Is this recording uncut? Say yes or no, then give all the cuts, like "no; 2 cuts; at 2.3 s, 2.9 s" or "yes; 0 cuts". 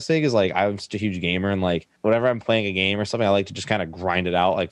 no; 1 cut; at 1.9 s